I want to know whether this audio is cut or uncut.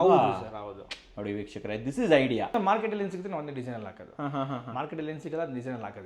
cut